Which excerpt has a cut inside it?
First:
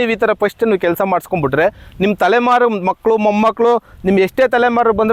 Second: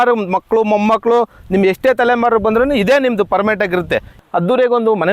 second; 1 cut; at 4.1 s

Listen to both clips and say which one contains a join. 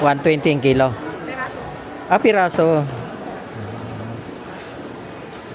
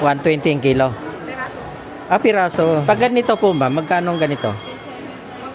second; 1 cut; at 2.8 s

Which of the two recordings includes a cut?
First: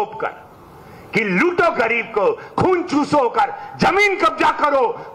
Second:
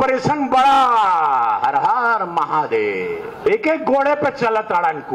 second; 1 cut; at 3.4 s

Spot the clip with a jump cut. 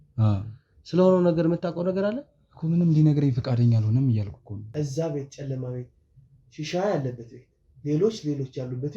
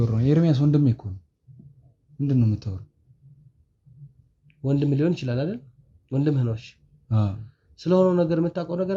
first; 1 cut; at 4.6 s

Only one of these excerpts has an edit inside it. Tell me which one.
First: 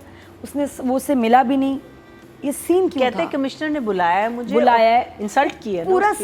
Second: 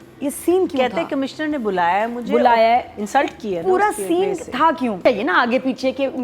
second; 1 cut; at 5.0 s

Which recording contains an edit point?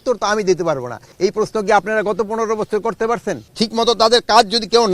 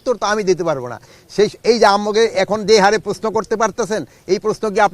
first; 2 cuts; at 1.1 s, 3.5 s

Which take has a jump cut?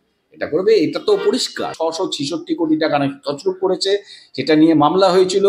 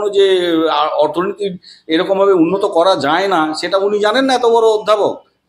first; 1 cut; at 1.7 s

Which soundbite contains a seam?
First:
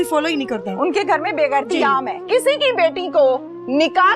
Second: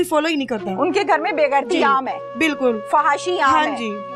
first; 1 cut; at 2.3 s

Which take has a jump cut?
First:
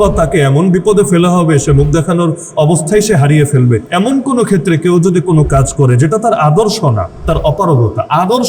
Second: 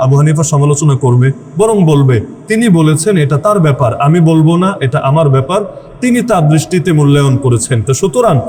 first; 2 cuts; at 2.4 s, 3.8 s

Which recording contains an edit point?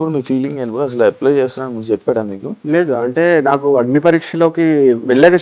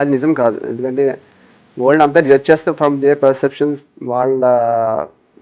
first; 1 cut; at 2.5 s

